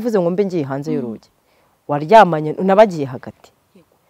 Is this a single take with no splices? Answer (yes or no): yes